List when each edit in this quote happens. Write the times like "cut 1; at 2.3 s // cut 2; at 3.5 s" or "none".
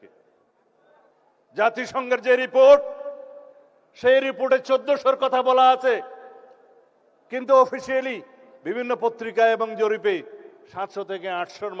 cut 1; at 1.1 s